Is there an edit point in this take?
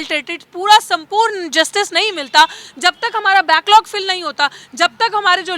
no; 0 cuts

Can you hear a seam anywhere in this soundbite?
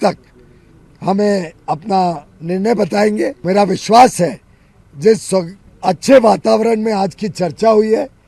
yes; 1 cut; at 3.4 s

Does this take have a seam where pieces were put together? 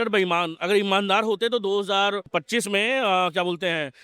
yes; 1 cut; at 2.3 s

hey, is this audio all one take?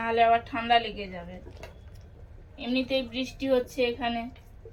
yes; 0 cuts

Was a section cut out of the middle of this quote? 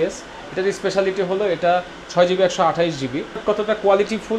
yes; 1 cut; at 3.4 s

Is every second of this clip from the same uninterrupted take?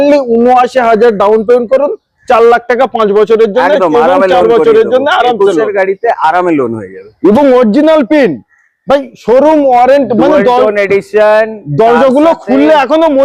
yes; 0 cuts

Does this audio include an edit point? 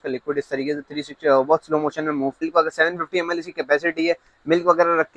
yes; 1 cut; at 2.4 s

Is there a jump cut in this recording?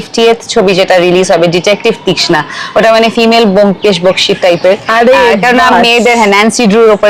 no; 0 cuts

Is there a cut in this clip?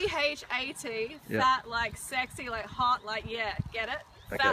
no; 0 cuts

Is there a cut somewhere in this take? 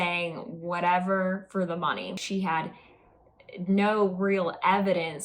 yes; 1 cut; at 2.2 s

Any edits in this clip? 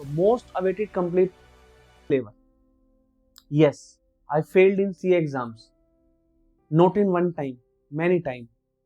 yes; 1 cut; at 2.0 s

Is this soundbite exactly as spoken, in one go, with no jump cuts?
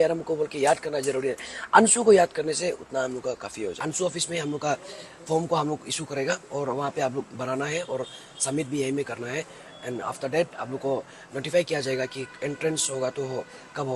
no; 1 cut; at 3.8 s

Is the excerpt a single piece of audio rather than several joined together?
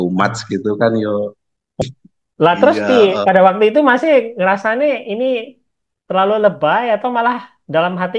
no; 1 cut; at 1.8 s

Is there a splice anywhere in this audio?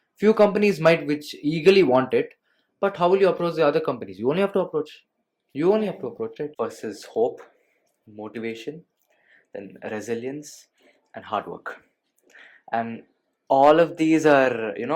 yes; 1 cut; at 6.5 s

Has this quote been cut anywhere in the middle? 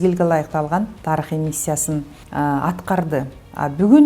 yes; 2 cuts; at 1.0 s, 2.2 s

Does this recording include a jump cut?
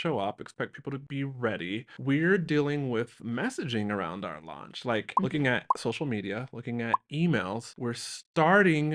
yes; 1 cut; at 5.1 s

